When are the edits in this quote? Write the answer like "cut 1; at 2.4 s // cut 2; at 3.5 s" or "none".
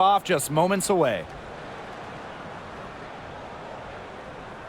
cut 1; at 1.3 s